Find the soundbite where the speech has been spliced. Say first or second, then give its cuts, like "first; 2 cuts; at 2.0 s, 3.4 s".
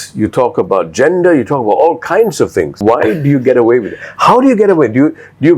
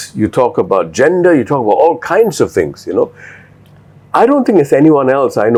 first; 1 cut; at 2.8 s